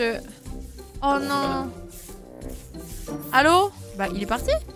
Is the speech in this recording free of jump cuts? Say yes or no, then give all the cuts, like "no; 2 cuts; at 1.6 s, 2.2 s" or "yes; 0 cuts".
no; 1 cut; at 3.8 s